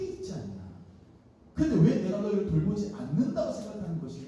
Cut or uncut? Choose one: uncut